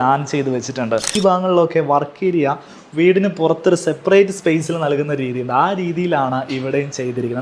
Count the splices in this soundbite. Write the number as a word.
one